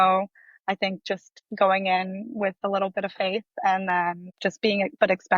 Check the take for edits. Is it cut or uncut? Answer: cut